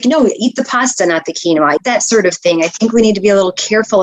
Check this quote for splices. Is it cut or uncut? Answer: cut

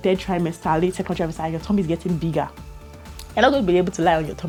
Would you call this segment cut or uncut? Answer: uncut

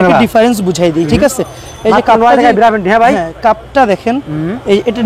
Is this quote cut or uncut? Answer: uncut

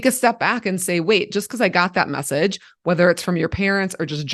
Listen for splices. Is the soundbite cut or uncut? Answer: uncut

